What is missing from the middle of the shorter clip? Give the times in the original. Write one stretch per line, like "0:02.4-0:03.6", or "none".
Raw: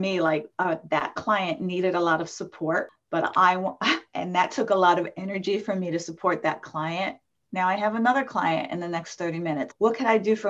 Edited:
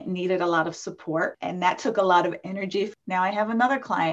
0:02.9-0:04.1
0:05.6-0:07.4